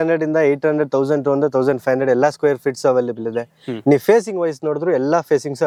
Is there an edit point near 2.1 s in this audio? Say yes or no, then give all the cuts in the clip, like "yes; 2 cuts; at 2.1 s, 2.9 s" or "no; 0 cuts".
no; 0 cuts